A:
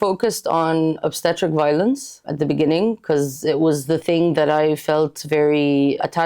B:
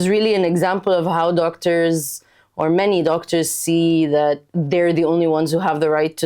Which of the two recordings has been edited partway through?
A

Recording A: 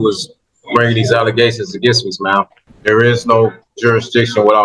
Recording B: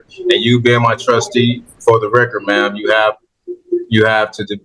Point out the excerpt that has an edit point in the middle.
A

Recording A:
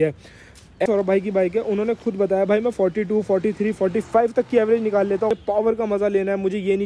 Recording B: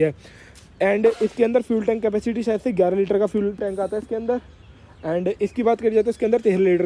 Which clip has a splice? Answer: A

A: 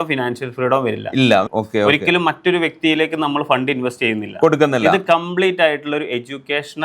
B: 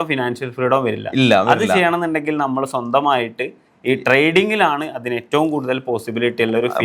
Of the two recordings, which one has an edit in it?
A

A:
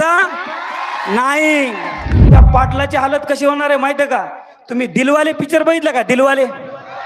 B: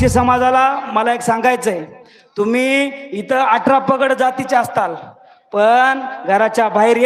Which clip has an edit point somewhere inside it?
A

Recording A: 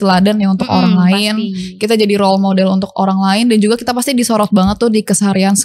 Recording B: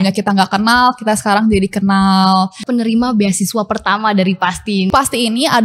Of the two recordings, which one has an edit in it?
B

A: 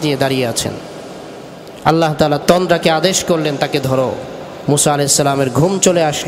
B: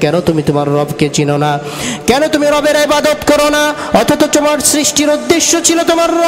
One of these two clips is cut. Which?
A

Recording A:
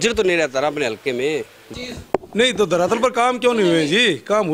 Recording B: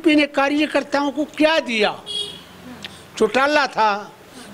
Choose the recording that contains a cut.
A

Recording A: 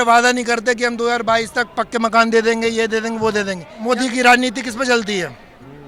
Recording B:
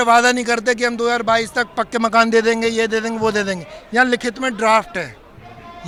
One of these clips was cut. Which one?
A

